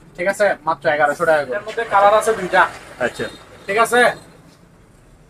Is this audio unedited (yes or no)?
yes